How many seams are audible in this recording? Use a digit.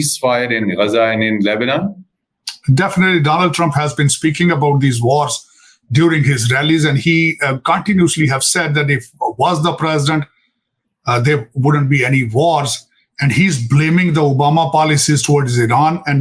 0